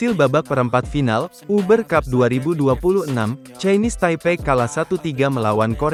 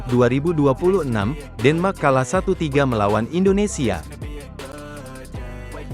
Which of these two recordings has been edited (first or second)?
second